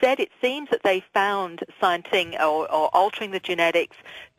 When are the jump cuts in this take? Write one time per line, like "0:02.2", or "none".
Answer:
none